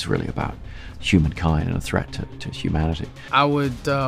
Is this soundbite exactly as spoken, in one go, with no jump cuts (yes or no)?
no